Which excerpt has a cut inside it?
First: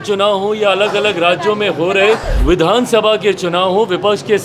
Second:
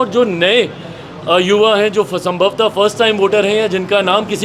first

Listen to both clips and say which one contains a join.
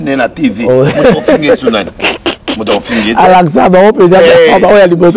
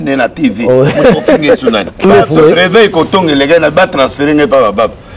second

